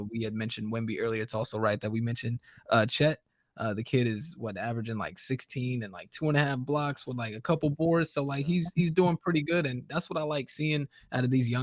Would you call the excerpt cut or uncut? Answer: uncut